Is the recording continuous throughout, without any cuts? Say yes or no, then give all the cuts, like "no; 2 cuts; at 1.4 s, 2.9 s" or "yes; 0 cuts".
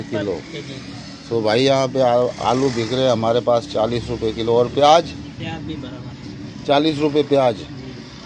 yes; 0 cuts